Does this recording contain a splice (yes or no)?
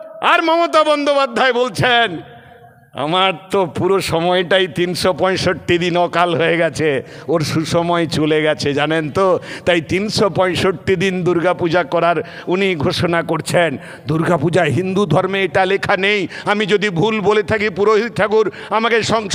no